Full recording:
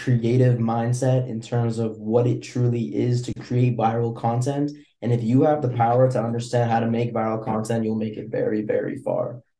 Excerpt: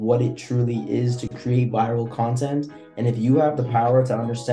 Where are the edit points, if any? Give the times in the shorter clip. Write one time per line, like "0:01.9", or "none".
none